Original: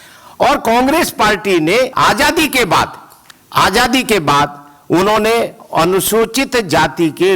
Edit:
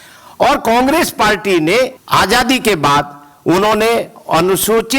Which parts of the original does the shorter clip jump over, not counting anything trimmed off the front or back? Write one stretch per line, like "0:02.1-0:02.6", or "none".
0:01.9-0:03.4